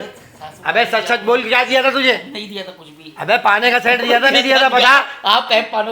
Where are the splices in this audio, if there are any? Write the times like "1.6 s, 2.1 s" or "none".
none